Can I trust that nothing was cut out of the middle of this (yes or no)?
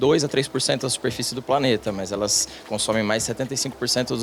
yes